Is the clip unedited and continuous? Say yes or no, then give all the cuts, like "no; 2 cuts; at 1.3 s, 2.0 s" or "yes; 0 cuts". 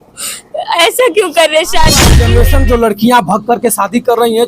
no; 1 cut; at 2.2 s